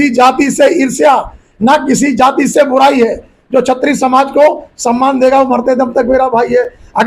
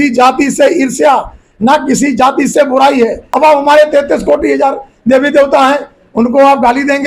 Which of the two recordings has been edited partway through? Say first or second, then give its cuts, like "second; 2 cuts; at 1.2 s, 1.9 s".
second; 1 cut; at 3.2 s